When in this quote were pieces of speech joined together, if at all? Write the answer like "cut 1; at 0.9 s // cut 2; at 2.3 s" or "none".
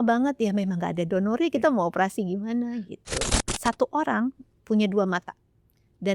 cut 1; at 3.4 s